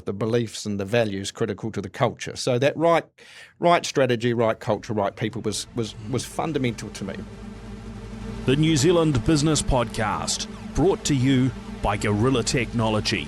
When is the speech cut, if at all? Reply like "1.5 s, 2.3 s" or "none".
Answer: 7.2 s